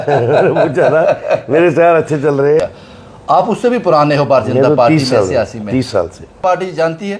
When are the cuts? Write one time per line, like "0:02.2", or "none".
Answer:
0:02.6
0:06.4